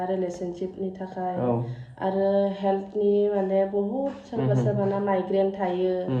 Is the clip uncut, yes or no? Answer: yes